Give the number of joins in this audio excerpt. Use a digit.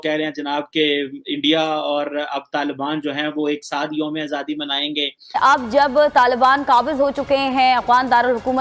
1